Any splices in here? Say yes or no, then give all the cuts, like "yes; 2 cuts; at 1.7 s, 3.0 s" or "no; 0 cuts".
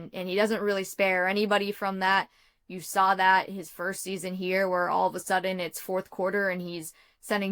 no; 0 cuts